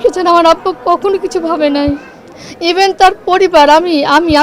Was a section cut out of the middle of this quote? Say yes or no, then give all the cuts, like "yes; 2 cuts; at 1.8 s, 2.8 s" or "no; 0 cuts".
no; 0 cuts